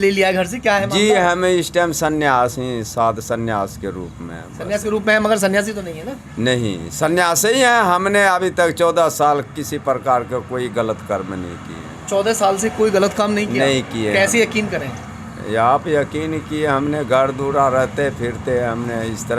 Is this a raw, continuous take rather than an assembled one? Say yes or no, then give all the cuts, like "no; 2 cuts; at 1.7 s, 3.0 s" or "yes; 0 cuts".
yes; 0 cuts